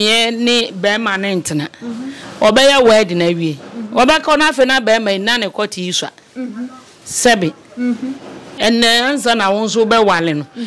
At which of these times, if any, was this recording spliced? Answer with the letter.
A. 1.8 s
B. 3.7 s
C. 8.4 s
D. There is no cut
C